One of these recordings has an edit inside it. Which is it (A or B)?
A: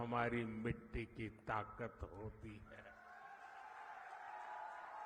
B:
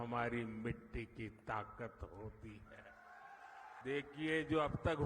B